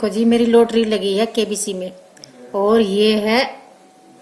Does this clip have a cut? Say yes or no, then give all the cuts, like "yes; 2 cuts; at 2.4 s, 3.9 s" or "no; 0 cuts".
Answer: no; 0 cuts